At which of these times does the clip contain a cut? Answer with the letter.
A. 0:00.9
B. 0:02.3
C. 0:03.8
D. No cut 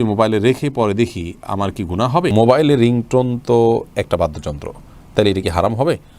B